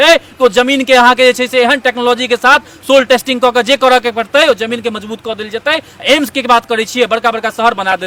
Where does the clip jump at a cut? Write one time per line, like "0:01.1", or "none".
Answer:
none